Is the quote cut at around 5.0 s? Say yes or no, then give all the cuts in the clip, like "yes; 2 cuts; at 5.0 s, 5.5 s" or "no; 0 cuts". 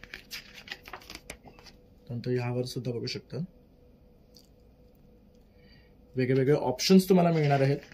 no; 0 cuts